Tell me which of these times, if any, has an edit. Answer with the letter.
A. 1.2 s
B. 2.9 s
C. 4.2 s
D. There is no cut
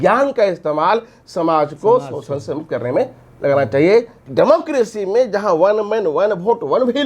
C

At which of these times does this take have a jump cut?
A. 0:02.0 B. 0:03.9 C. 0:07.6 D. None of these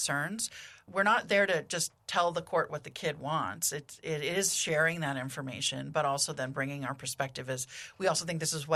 D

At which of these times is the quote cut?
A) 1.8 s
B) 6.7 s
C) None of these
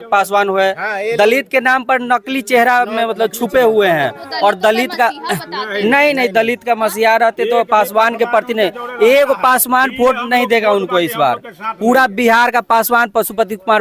C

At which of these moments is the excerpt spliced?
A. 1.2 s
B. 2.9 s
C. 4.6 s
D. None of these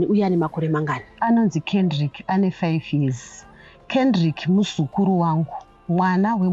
A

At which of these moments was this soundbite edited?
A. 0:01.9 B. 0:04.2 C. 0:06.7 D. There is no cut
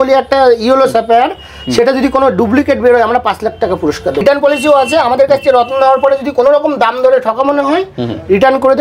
B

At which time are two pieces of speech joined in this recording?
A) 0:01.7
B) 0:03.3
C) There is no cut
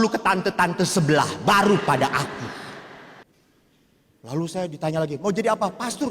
B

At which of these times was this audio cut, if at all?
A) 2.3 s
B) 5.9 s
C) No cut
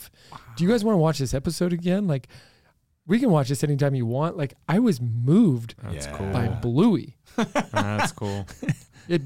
C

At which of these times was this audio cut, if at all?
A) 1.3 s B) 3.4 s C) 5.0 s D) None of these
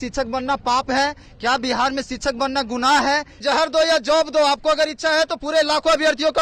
B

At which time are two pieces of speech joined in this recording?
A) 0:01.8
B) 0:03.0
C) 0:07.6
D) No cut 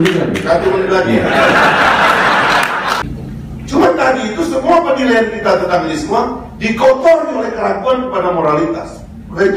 B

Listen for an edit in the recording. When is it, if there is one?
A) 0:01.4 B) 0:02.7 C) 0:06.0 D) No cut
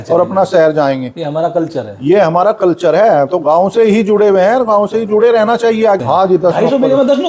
C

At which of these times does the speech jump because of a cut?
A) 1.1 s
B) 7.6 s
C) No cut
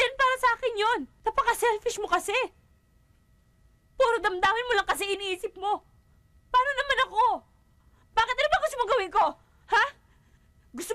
A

